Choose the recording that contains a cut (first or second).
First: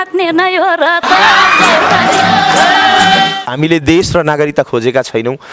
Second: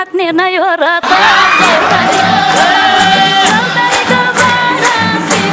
first